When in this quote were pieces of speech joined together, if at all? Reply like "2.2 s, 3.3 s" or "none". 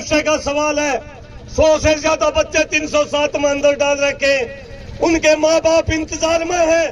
none